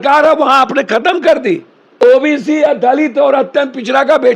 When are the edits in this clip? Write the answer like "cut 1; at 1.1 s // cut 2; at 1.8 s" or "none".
cut 1; at 2.0 s